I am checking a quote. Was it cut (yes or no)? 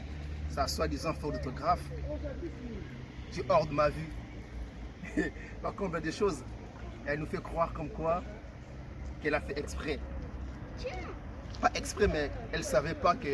no